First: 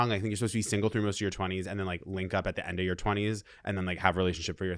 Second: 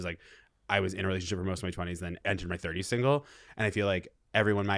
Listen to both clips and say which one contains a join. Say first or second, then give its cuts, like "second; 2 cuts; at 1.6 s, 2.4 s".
second; 1 cut; at 2.2 s